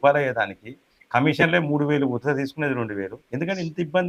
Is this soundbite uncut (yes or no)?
no